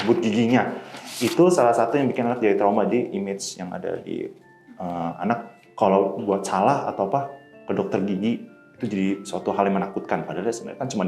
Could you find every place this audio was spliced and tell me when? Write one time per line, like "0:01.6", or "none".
none